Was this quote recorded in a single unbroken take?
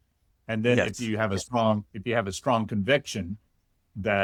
yes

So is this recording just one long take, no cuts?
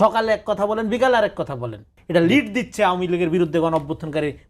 no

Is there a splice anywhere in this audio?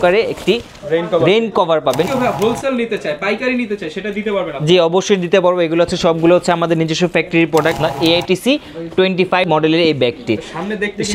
yes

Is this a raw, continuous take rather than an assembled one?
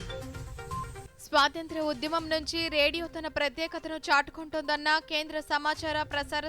yes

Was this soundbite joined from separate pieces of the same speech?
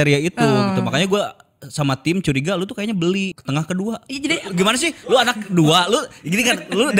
yes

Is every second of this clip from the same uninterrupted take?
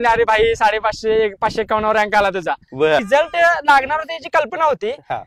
no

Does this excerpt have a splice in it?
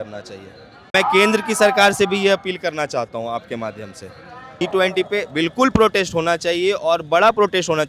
yes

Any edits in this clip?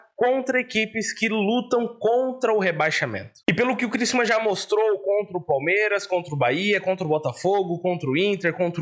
yes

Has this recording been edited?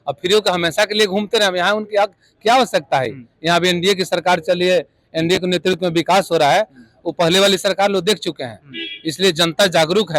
no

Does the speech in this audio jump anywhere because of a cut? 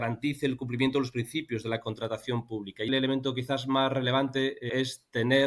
yes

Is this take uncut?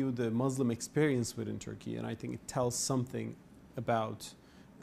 no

